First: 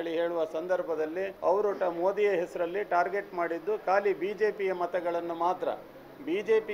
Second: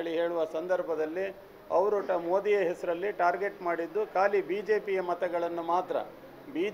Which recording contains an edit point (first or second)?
first